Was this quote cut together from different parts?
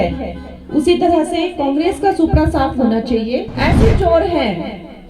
yes; 1 cut; at 3.5 s

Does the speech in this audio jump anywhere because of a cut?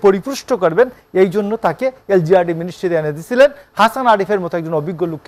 no; 0 cuts

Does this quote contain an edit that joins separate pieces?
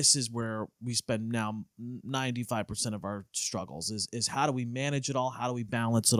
no; 0 cuts

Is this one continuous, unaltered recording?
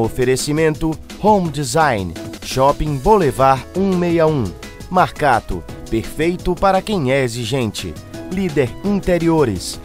yes; 0 cuts

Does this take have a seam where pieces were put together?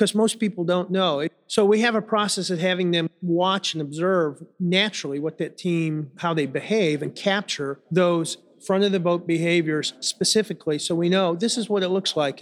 yes; 5 cuts; at 1.4 s, 3.2 s, 4.5 s, 6.1 s, 7.7 s

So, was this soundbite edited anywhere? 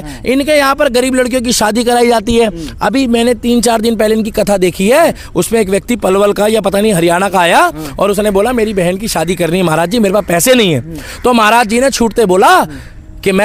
no; 0 cuts

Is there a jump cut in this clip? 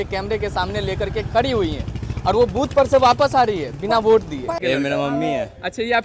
yes; 1 cut; at 4.6 s

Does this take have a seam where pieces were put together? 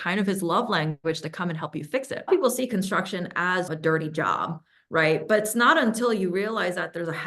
yes; 1 cut; at 2.3 s

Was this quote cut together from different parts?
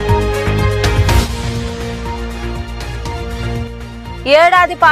yes; 1 cut; at 0.9 s

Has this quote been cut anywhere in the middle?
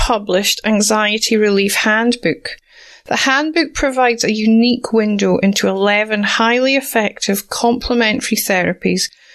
no; 0 cuts

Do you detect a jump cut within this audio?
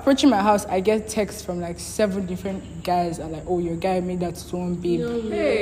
no; 0 cuts

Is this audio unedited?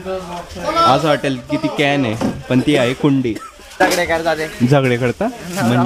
no; 1 cut; at 3.7 s

